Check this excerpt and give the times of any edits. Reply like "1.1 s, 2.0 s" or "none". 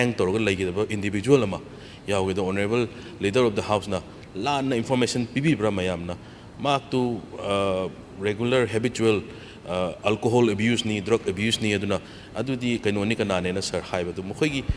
none